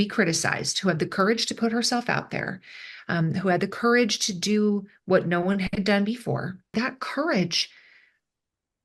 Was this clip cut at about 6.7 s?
yes; 1 cut; at 6.7 s

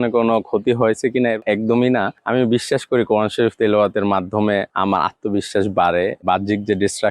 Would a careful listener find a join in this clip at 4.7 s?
yes; 4 cuts; at 1.4 s, 2.2 s, 4.7 s, 6.2 s

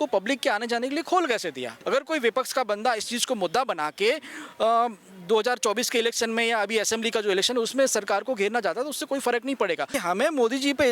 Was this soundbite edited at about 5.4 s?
no; 2 cuts; at 1.7 s, 9.9 s

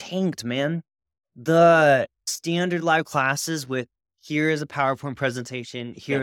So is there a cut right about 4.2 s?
no; 1 cut; at 2.2 s

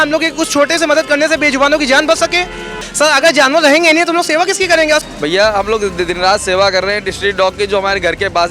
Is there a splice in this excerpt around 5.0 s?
yes; 2 cuts; at 2.8 s, 5.0 s

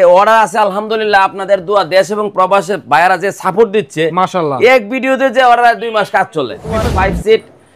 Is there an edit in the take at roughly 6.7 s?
yes; 1 cut; at 6.7 s

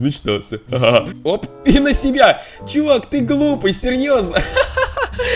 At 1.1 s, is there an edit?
yes; 1 cut; at 1.1 s

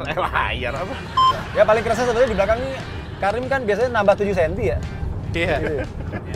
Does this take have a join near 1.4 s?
yes; 1 cut; at 1.4 s

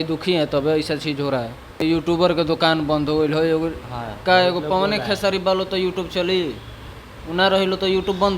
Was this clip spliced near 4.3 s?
no; 1 cut; at 1.8 s

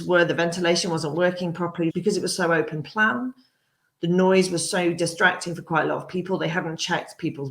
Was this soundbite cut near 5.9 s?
no; 1 cut; at 1.9 s

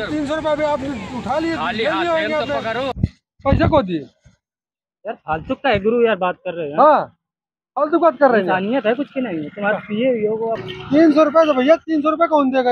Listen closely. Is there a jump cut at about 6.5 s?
no; 2 cuts; at 2.9 s, 10.7 s

